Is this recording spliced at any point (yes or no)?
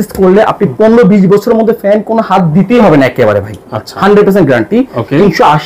no